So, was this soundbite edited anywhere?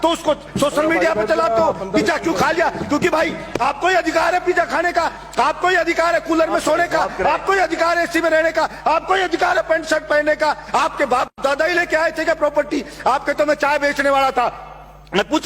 no; 0 cuts

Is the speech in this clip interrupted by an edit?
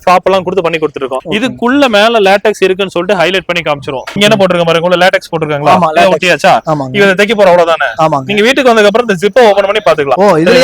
yes; 1 cut; at 4.2 s

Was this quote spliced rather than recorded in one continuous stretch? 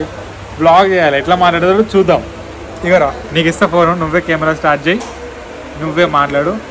no; 0 cuts

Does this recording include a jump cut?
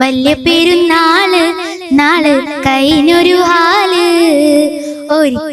no; 0 cuts

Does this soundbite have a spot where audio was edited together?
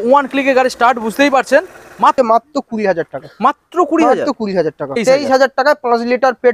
yes; 2 cuts; at 2.1 s, 5.0 s

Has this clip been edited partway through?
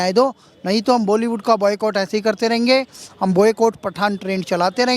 no; 0 cuts

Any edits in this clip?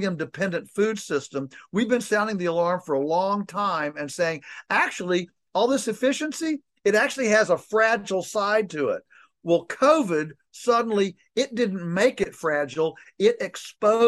no; 0 cuts

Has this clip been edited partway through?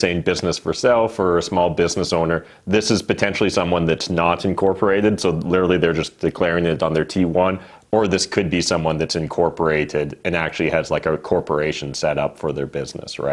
no; 0 cuts

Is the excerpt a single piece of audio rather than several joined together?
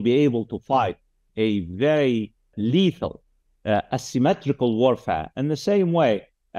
no; 1 cut; at 2.5 s

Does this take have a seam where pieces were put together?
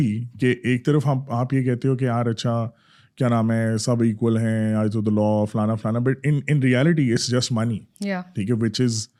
no; 0 cuts

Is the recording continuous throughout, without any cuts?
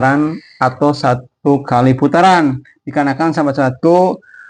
yes; 0 cuts

